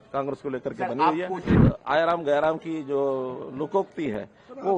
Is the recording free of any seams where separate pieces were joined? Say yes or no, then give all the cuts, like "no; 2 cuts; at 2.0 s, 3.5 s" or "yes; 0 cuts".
no; 1 cut; at 1.5 s